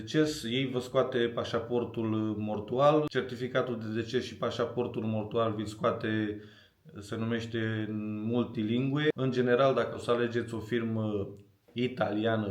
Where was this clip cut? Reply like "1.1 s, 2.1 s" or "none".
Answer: 3.1 s, 9.1 s